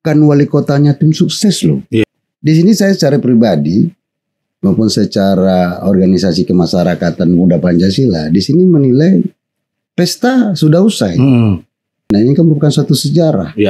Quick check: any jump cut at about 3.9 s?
no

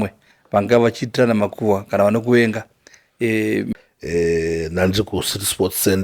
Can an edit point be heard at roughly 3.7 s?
yes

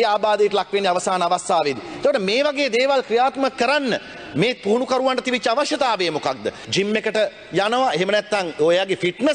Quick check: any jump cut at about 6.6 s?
yes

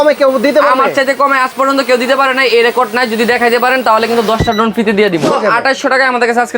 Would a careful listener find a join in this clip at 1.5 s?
no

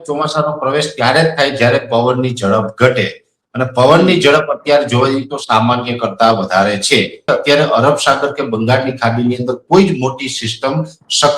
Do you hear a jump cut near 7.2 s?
yes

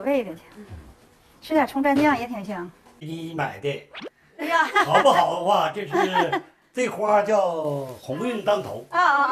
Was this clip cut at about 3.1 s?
yes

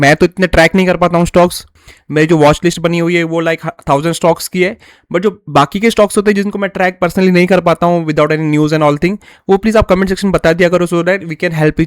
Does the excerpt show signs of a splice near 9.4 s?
no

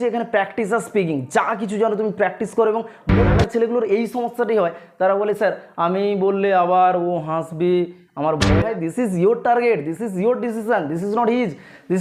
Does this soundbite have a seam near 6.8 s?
no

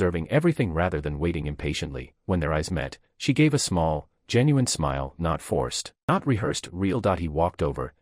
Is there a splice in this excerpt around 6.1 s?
yes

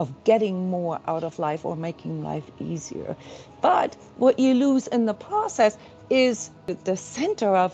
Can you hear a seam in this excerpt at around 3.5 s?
no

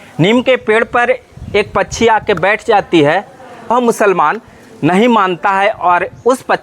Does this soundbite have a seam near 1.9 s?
no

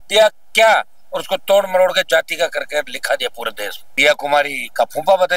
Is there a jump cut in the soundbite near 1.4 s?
no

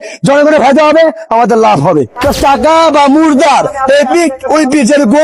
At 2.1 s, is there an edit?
yes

